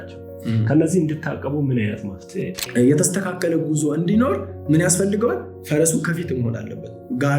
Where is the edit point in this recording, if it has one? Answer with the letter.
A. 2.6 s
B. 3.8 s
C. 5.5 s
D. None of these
A